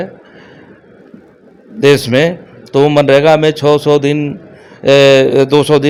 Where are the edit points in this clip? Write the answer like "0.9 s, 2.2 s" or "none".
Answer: none